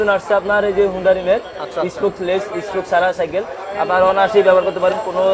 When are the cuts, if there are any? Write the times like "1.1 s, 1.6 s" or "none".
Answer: none